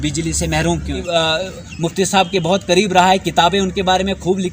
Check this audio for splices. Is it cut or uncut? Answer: cut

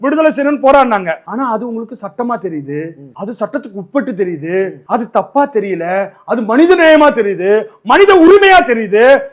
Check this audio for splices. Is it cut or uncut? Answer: cut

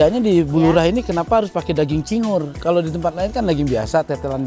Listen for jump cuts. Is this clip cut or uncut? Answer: uncut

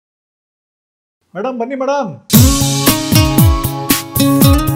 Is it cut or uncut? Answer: uncut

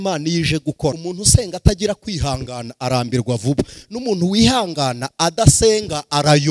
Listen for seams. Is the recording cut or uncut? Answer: cut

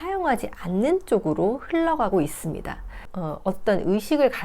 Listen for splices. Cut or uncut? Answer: cut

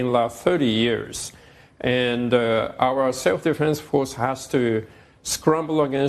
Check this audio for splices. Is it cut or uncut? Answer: uncut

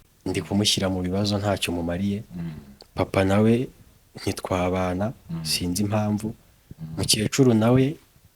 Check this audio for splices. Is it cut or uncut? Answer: uncut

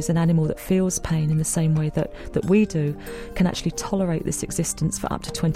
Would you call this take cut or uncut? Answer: uncut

